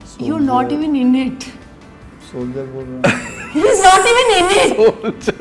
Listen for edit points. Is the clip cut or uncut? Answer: uncut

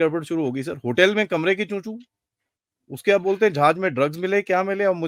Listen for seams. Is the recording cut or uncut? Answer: uncut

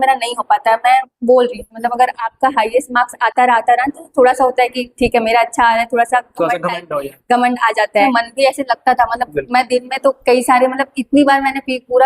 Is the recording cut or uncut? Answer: cut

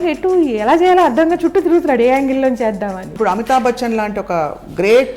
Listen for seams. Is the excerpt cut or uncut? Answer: cut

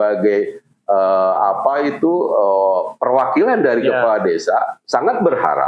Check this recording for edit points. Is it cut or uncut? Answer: uncut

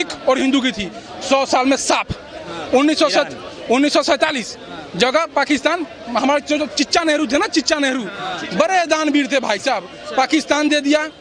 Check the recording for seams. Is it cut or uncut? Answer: uncut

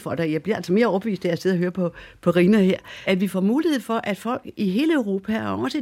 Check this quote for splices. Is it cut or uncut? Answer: cut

